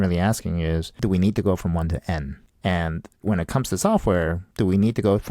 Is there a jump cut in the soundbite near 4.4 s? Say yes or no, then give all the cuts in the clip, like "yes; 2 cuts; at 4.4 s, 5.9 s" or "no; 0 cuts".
yes; 4 cuts; at 0.9 s, 2.4 s, 3.1 s, 4.4 s